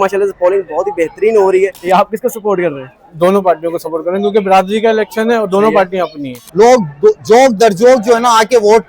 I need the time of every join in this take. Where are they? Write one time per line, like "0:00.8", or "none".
0:01.8
0:06.4